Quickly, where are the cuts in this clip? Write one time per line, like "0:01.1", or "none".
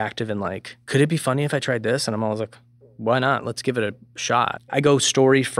0:04.7